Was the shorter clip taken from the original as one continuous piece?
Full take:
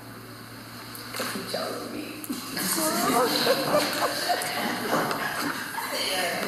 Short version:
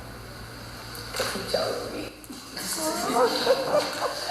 yes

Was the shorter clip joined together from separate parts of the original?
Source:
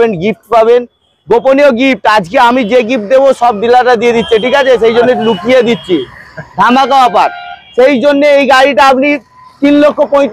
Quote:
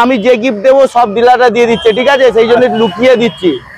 no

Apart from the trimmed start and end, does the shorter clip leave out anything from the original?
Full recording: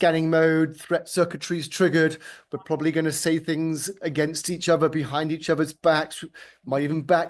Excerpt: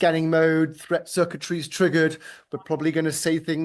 no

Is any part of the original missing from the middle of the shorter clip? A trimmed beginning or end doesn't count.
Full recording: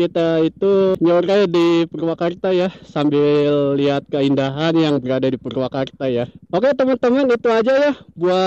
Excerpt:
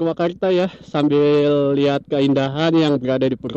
no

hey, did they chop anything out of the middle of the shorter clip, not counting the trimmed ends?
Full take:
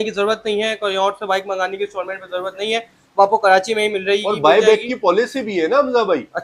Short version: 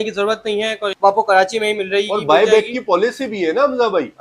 yes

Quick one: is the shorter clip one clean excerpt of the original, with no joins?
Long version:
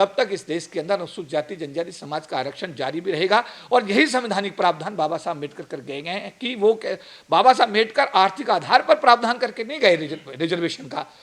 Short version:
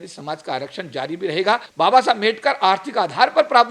no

